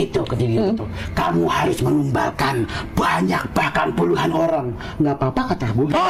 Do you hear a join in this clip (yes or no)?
no